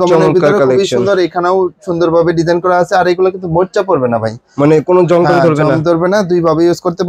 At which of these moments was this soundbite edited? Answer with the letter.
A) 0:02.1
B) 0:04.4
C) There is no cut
C